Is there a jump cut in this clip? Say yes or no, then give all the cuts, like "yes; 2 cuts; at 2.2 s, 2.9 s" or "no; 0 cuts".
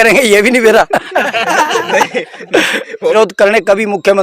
yes; 1 cut; at 3.1 s